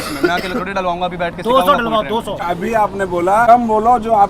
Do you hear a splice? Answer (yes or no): yes